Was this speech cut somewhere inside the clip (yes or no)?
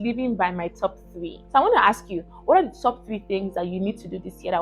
yes